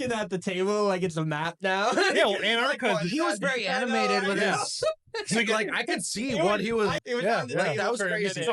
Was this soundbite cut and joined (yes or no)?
yes